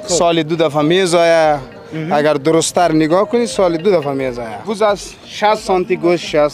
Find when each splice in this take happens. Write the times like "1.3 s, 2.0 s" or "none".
4.6 s